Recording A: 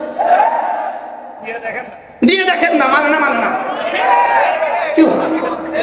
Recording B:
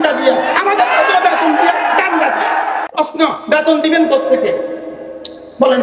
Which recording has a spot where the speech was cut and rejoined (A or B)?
B